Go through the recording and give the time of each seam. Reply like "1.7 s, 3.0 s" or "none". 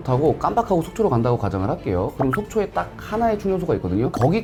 none